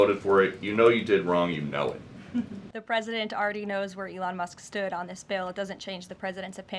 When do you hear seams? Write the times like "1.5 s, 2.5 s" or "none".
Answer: 2.7 s